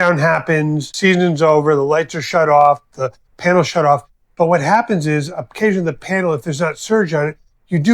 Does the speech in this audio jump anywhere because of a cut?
yes; 1 cut; at 0.9 s

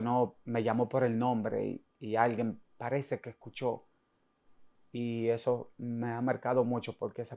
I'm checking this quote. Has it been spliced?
no; 0 cuts

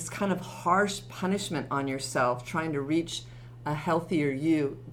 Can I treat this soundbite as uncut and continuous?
yes; 0 cuts

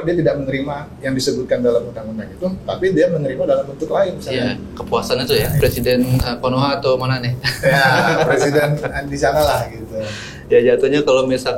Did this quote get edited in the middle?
yes; 1 cut; at 5.5 s

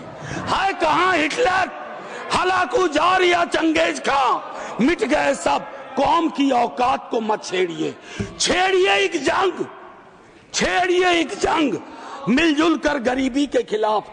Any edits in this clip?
no; 0 cuts

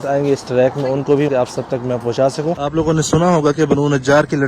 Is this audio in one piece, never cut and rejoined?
no; 2 cuts; at 1.3 s, 2.6 s

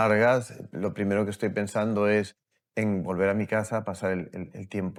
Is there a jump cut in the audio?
no; 0 cuts

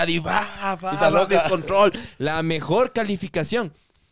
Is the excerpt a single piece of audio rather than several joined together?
no; 1 cut; at 2.0 s

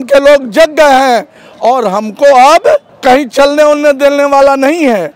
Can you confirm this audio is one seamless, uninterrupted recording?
yes; 0 cuts

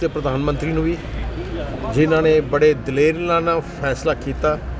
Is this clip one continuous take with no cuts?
yes; 0 cuts

